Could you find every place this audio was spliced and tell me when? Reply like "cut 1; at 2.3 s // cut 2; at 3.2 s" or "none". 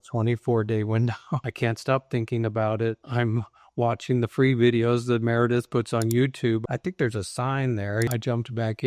cut 1; at 1.5 s // cut 2; at 8.0 s